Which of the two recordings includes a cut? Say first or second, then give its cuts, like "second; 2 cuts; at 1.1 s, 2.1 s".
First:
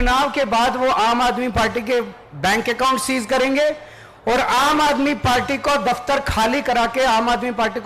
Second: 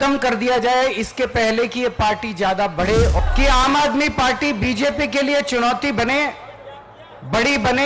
second; 1 cut; at 3.1 s